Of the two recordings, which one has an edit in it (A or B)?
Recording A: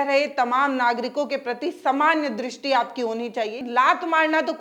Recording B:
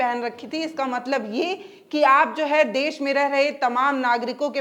A